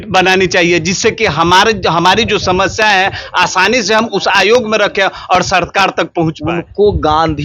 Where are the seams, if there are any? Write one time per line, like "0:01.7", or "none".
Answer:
0:06.1

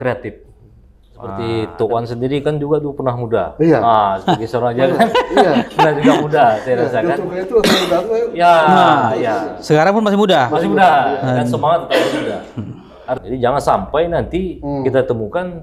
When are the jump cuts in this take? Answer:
0:01.4
0:13.2

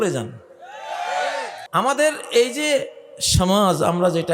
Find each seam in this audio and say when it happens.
0:01.5

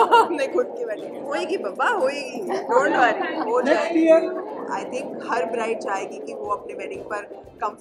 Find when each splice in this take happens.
0:01.0
0:04.5

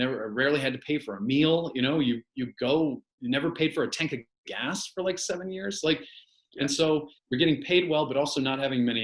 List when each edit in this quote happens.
none

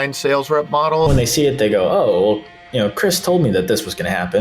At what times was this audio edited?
0:01.1

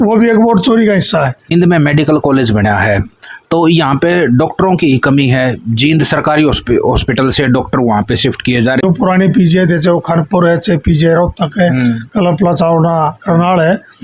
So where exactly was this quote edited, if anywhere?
0:01.4
0:08.8

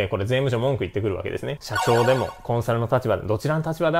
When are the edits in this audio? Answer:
0:01.6

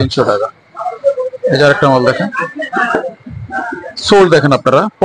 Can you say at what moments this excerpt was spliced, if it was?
none

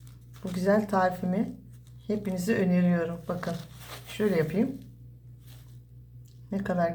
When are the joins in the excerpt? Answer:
none

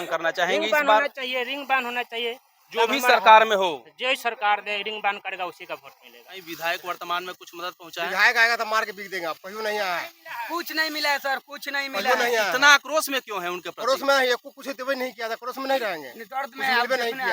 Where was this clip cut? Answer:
0:06.4

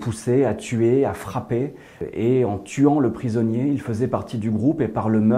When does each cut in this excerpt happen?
0:02.0

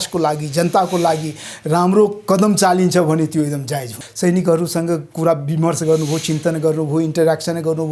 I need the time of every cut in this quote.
0:04.0

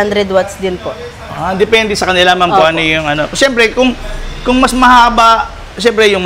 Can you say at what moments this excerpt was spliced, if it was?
none

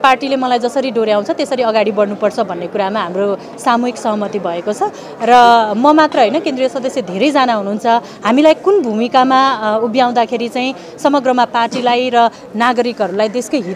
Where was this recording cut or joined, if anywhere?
none

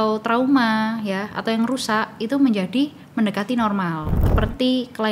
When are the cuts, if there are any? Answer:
0:04.2

